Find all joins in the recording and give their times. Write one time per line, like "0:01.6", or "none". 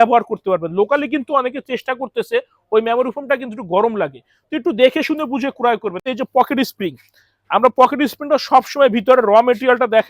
0:06.0

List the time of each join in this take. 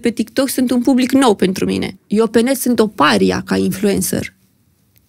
0:02.0

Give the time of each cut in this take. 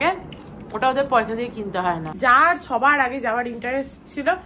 0:02.2

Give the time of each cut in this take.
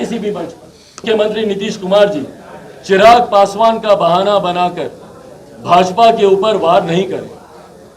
0:01.0

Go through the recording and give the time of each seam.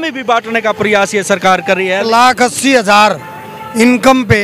0:02.0

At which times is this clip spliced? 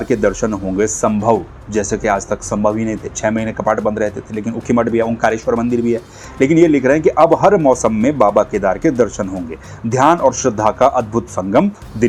none

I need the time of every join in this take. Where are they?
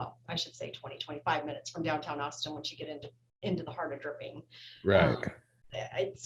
none

